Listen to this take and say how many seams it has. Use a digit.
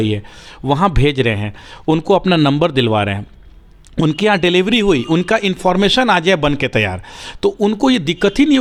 0